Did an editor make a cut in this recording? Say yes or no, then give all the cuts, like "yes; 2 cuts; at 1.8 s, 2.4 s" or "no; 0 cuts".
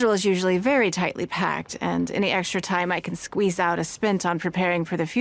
no; 0 cuts